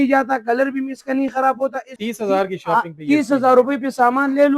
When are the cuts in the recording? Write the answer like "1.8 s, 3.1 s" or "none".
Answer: 2.0 s